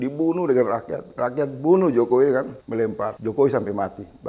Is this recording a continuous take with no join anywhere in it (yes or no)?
no